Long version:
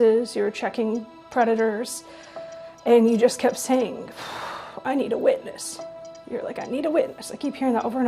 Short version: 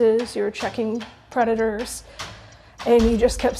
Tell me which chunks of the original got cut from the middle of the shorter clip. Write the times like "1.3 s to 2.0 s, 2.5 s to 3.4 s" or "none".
none